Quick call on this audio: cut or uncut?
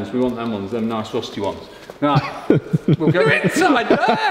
uncut